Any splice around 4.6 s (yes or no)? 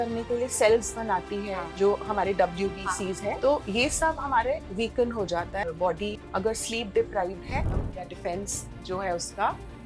no